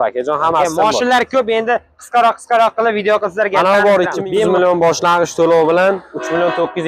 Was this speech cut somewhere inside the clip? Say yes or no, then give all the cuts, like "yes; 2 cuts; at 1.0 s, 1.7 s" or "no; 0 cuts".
yes; 1 cut; at 4.2 s